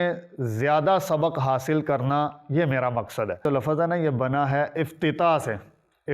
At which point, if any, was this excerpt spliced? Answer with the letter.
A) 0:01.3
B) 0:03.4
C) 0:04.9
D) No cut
B